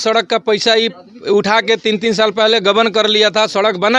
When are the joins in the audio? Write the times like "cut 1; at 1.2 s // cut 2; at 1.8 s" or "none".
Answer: none